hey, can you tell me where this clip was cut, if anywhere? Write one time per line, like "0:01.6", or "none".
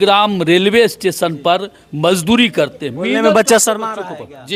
none

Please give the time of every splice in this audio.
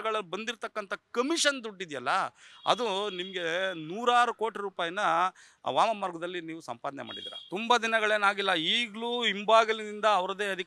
none

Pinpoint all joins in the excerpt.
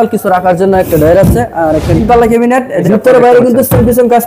0:01.6
0:02.8

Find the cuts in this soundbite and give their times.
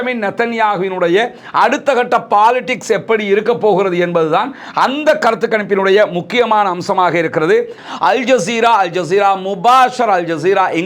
0:07.8

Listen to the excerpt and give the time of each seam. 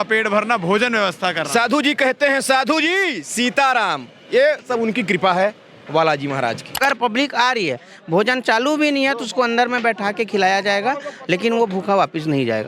0:06.8

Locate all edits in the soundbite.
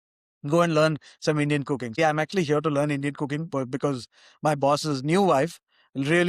0:02.0

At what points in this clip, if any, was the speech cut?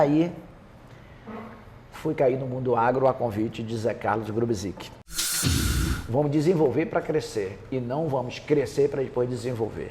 0:05.5

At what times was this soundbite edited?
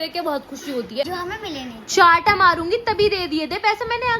0:01.0

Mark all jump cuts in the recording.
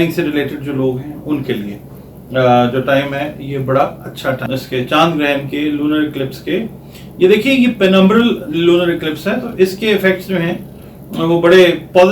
0:04.5

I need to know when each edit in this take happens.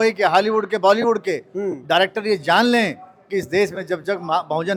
none

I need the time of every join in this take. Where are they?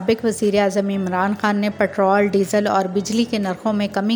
none

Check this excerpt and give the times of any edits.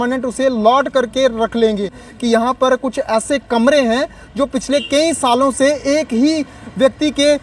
0:02.1

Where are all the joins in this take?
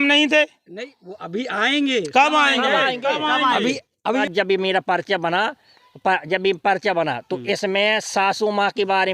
0:04.2

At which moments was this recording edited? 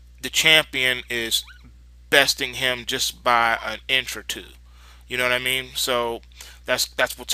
none

